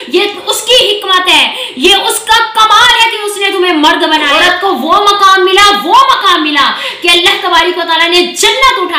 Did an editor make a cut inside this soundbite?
yes; 1 cut; at 4.3 s

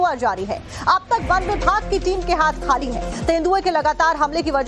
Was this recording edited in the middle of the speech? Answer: yes; 1 cut; at 3.1 s

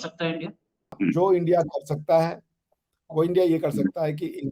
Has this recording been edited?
yes; 1 cut; at 0.9 s

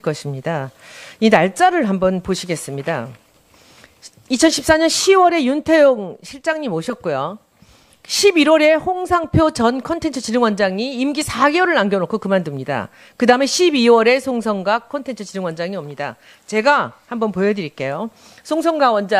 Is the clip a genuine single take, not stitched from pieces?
yes; 0 cuts

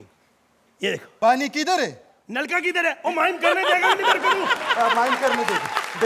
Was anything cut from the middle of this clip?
yes; 1 cut; at 1.1 s

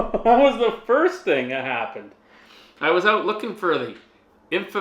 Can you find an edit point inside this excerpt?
no; 0 cuts

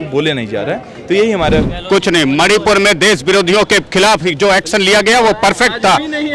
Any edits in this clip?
yes; 1 cut; at 1.6 s

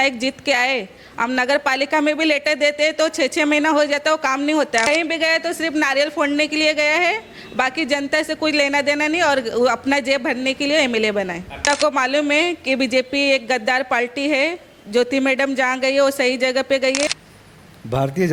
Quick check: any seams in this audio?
yes; 3 cuts; at 4.9 s, 11.6 s, 17.1 s

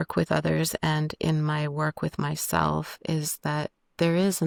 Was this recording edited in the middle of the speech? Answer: no; 0 cuts

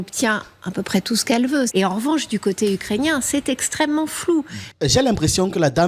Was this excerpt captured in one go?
no; 2 cuts; at 1.7 s, 4.6 s

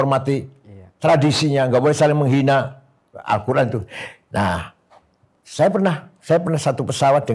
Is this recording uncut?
yes; 0 cuts

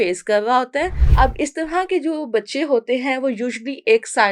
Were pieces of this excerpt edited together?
yes; 1 cut; at 1.0 s

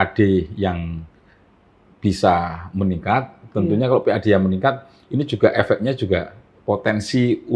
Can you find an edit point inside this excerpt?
no; 0 cuts

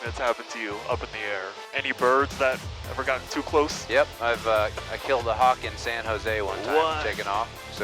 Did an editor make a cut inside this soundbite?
no; 0 cuts

